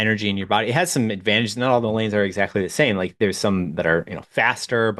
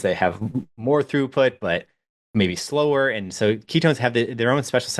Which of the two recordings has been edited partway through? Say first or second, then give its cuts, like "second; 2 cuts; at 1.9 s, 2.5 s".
second; 1 cut; at 2.1 s